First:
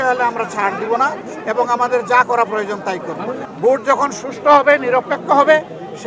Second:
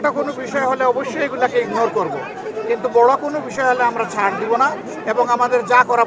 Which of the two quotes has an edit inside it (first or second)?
first